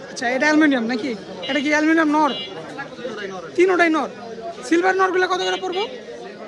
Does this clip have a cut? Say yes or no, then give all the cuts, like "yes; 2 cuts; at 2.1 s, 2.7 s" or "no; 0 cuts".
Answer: no; 0 cuts